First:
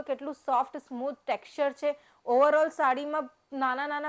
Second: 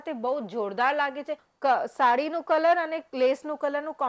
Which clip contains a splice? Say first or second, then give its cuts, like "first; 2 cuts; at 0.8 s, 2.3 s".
second; 1 cut; at 1.4 s